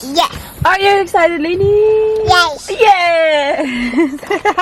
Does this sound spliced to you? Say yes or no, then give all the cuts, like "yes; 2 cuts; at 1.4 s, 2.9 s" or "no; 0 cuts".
no; 0 cuts